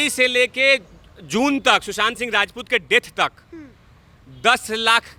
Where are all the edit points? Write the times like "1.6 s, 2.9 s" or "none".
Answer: none